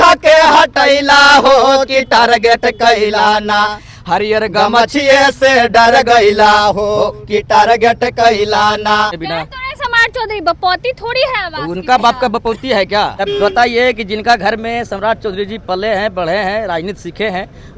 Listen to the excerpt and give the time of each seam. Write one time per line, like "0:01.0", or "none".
0:09.2
0:13.2